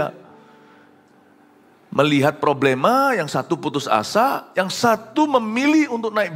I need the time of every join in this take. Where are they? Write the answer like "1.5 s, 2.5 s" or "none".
none